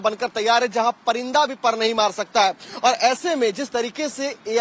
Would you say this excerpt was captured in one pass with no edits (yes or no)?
yes